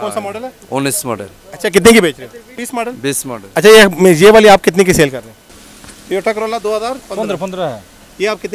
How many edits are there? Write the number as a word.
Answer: two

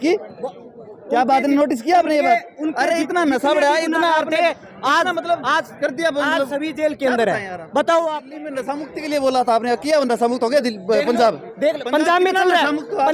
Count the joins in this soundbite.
one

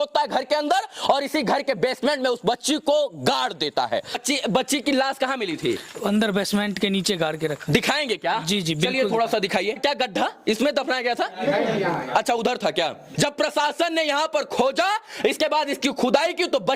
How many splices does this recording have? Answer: three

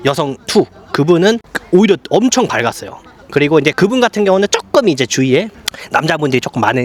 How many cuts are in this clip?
zero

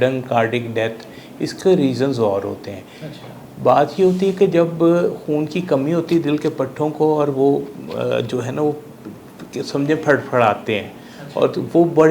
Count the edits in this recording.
zero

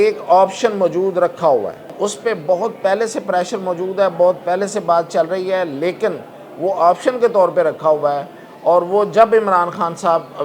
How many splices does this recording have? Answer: one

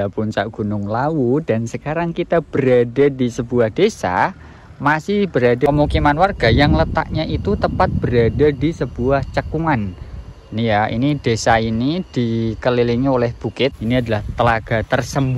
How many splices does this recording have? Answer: two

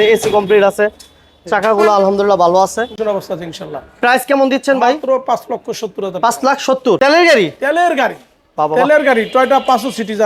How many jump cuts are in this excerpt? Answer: two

